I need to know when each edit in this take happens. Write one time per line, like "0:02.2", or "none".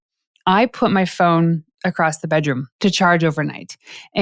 0:02.7

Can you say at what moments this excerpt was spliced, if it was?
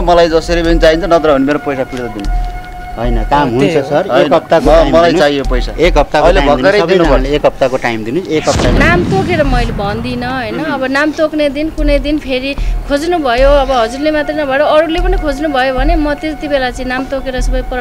0:08.8

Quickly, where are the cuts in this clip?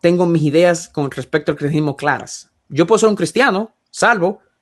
none

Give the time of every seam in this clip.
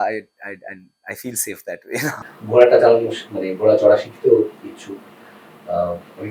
0:02.2

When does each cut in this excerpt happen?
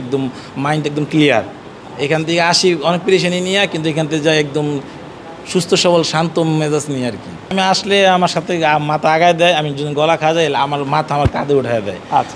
0:07.5

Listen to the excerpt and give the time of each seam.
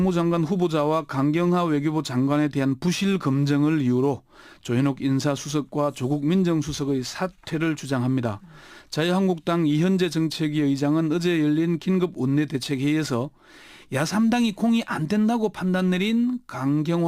0:13.7

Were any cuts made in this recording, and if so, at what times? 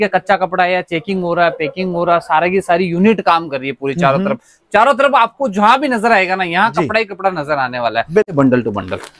0:08.3

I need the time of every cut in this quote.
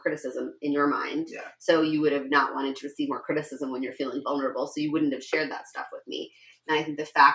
none

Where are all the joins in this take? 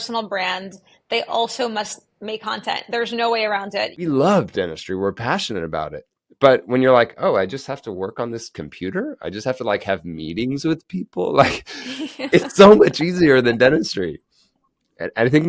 0:04.0

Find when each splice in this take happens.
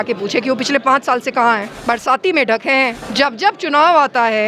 0:01.7
0:03.0

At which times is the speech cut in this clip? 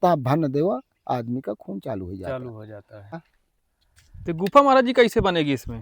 0:03.2

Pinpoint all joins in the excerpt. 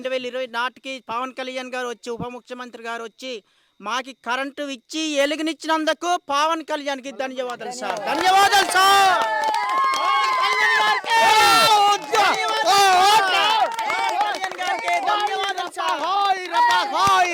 none

